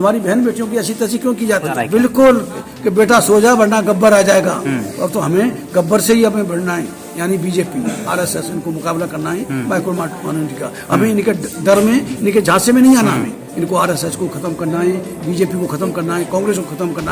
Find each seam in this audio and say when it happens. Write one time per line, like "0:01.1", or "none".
0:01.7
0:13.5